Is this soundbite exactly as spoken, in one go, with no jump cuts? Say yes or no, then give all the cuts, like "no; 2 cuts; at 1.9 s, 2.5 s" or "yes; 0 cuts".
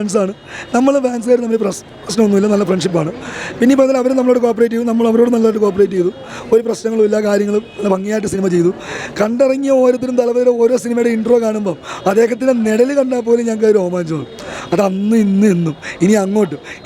yes; 0 cuts